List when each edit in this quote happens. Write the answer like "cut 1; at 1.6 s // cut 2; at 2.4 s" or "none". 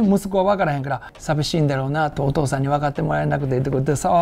cut 1; at 1.1 s